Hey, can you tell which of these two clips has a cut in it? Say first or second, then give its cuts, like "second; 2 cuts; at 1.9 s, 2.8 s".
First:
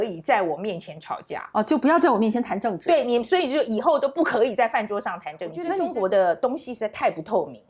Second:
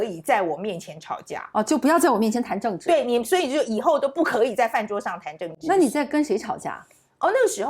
first; 1 cut; at 5.7 s